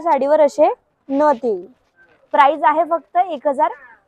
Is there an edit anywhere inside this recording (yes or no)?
no